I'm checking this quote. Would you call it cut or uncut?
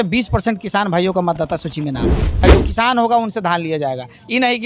cut